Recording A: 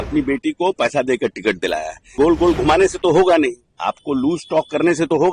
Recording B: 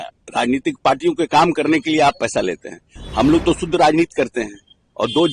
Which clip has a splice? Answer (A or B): A